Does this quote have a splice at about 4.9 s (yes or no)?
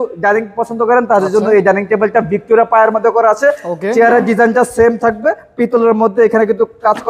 no